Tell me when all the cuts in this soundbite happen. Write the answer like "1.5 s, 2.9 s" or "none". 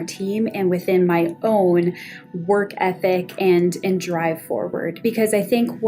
5.0 s